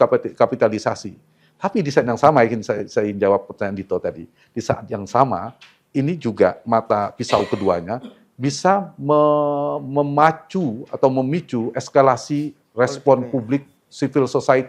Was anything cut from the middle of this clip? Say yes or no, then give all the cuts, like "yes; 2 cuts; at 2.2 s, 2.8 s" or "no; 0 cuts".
no; 0 cuts